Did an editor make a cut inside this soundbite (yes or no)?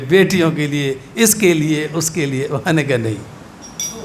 no